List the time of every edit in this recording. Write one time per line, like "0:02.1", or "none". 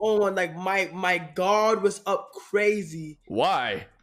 none